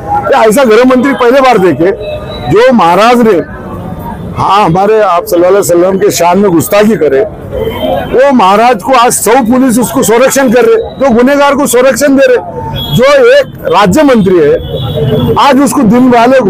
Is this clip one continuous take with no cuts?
yes; 0 cuts

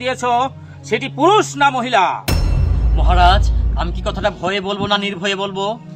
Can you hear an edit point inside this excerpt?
no; 0 cuts

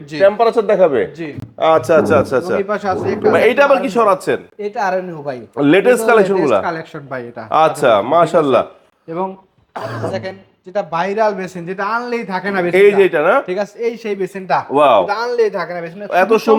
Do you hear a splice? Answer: no; 0 cuts

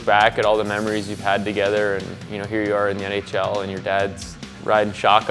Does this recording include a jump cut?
no; 0 cuts

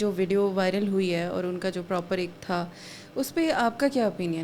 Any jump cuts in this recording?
no; 0 cuts

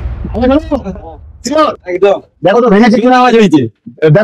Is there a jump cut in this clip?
no; 0 cuts

